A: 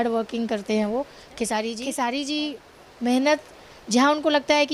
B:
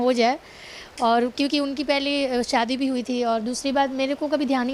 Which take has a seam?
A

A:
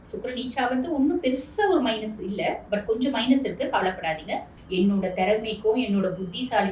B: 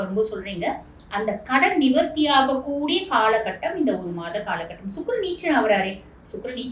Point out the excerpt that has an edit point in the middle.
A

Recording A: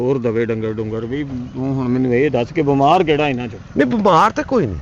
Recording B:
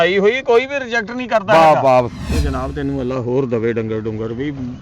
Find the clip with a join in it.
B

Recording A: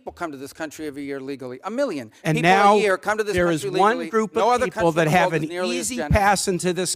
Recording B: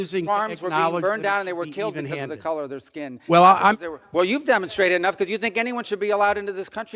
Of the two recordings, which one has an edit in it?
B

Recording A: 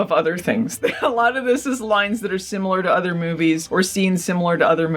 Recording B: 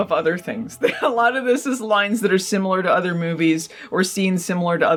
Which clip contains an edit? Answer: A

